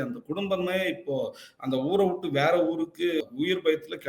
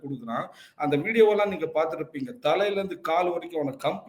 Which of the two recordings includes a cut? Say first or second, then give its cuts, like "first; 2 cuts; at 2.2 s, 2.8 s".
first; 1 cut; at 3.2 s